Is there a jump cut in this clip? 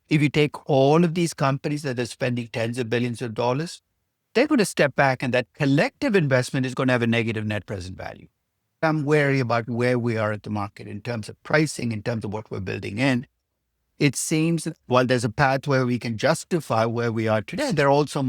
yes; 1 cut; at 8.8 s

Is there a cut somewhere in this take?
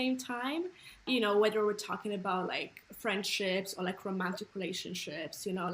yes; 1 cut; at 1.0 s

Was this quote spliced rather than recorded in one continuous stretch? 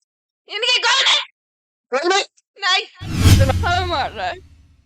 yes; 1 cut; at 3.5 s

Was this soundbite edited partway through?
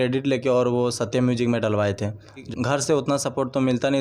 yes; 1 cut; at 2.5 s

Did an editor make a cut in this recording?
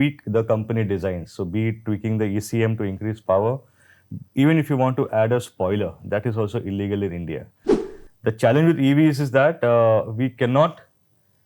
yes; 1 cut; at 7.7 s

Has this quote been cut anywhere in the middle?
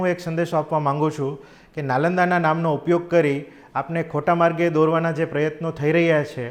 no; 0 cuts

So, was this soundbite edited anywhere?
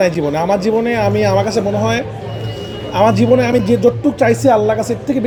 no; 0 cuts

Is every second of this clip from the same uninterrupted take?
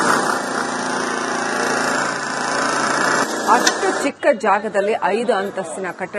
no; 1 cut; at 3.5 s

